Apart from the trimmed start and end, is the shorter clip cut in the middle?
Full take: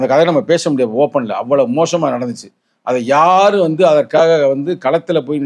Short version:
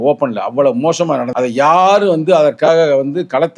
yes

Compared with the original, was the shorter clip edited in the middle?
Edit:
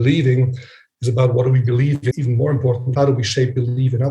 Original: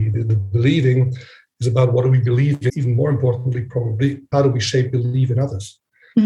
yes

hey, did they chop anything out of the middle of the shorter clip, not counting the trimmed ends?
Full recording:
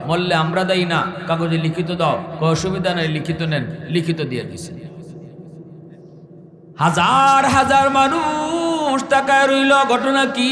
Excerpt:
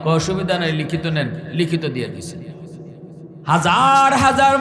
yes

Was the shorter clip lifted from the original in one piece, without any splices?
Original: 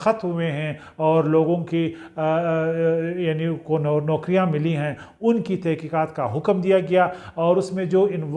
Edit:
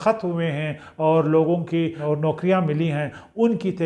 no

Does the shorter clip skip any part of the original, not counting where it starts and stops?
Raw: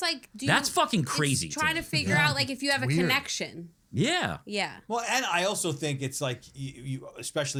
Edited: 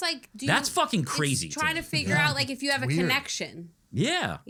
no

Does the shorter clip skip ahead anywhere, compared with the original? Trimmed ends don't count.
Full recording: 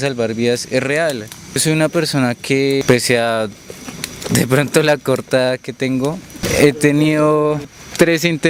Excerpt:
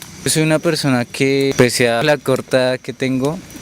yes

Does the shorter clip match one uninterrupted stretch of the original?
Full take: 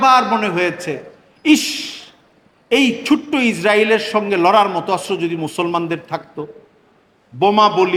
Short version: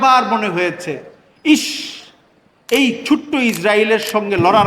yes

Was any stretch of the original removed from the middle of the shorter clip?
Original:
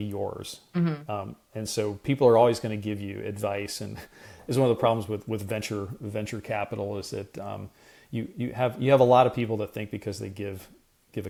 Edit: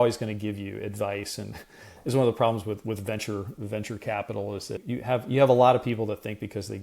yes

